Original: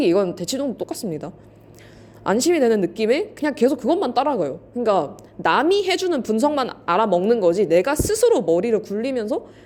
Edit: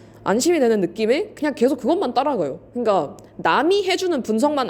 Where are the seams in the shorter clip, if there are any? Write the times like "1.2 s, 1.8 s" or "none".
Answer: none